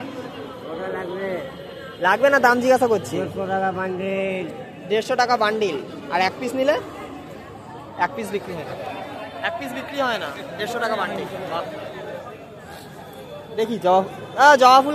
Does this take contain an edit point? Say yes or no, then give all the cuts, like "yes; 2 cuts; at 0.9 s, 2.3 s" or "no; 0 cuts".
no; 0 cuts